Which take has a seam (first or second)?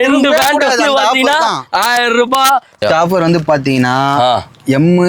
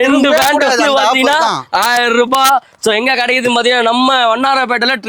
first